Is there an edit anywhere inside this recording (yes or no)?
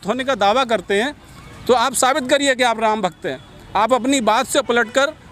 no